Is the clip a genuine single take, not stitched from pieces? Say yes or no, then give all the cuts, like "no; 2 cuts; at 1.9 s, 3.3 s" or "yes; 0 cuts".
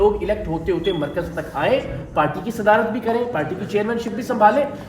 yes; 0 cuts